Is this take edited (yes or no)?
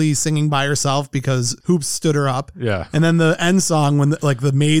no